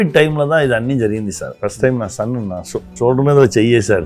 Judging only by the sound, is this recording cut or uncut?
cut